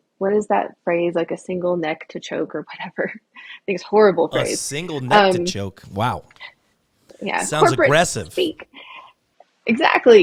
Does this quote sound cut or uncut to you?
uncut